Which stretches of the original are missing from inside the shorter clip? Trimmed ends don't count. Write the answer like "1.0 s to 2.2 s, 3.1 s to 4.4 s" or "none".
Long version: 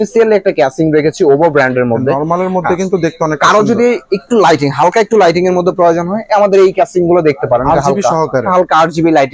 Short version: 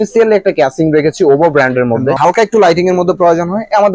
2.2 s to 4.8 s